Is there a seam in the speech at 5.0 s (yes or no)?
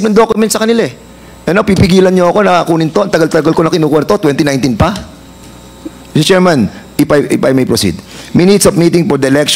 no